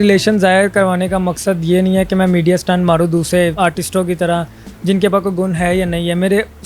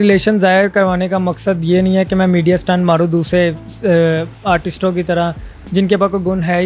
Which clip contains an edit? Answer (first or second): first